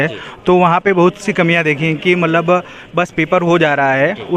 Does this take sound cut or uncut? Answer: uncut